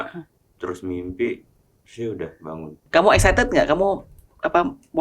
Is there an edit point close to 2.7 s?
yes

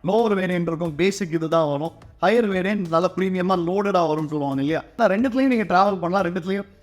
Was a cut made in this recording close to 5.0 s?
yes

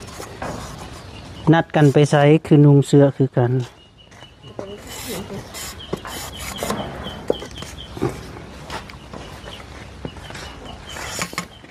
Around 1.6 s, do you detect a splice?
no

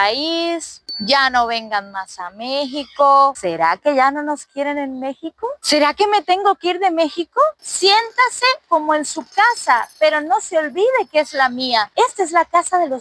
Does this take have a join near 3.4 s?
yes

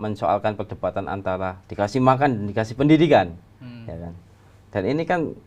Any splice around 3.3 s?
no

